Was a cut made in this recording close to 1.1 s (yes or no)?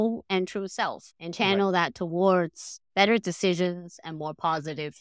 no